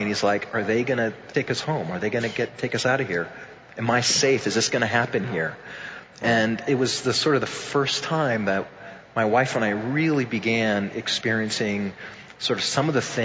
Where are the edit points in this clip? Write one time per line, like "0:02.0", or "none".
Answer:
0:01.2